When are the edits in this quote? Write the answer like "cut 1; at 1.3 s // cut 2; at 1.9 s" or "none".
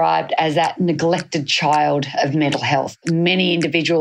cut 1; at 3.0 s